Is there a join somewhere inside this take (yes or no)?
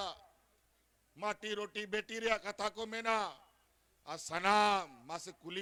no